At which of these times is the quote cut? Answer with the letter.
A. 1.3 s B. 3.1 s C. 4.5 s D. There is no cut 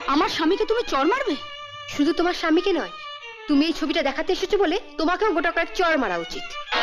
D